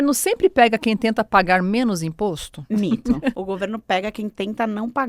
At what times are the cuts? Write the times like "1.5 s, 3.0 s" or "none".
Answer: 2.5 s, 3.4 s